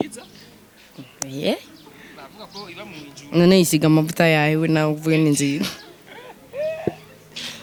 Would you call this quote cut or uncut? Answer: uncut